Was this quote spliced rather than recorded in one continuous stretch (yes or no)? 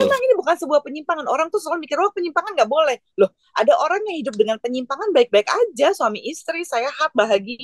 no